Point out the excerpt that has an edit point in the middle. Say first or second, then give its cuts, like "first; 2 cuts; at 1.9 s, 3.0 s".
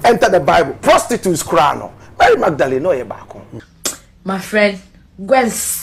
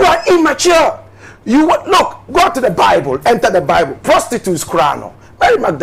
first; 1 cut; at 3.6 s